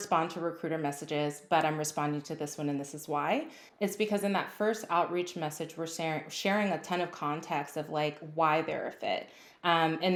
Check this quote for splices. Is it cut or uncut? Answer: uncut